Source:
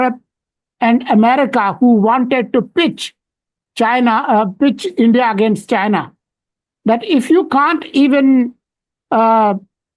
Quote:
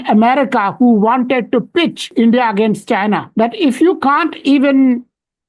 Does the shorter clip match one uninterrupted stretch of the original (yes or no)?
no